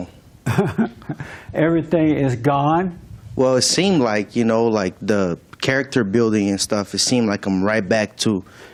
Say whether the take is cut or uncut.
uncut